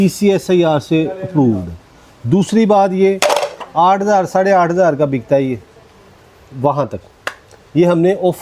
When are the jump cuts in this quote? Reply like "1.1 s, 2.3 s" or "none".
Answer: none